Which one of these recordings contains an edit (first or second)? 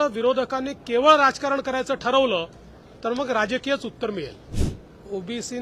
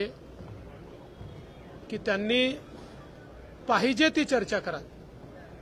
first